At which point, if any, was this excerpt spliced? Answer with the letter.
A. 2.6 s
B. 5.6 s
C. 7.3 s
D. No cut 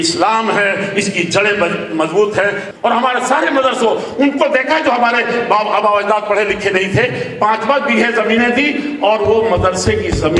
A